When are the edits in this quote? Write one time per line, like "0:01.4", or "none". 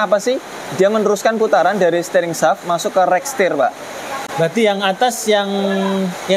none